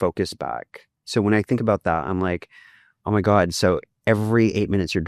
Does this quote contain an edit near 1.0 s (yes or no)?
yes